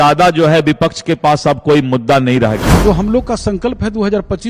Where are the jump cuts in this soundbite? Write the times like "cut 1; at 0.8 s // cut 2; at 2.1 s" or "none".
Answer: cut 1; at 2.7 s